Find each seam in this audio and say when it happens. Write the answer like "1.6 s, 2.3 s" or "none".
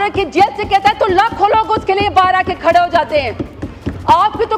none